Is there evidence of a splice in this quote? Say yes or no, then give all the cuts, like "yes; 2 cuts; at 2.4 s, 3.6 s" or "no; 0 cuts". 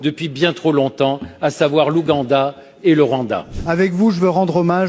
yes; 1 cut; at 3.5 s